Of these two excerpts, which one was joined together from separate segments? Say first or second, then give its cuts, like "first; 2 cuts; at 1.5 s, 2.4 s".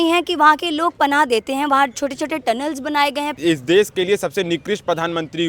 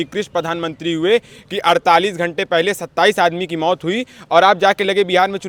first; 1 cut; at 3.3 s